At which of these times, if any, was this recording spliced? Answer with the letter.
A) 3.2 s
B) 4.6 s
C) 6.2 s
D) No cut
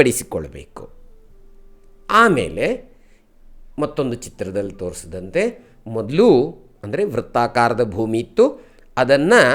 D